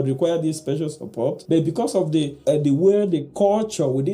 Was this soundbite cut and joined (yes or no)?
yes